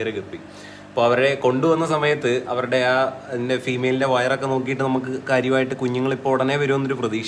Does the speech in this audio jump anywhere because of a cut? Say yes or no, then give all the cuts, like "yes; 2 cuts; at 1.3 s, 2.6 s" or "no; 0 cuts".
no; 0 cuts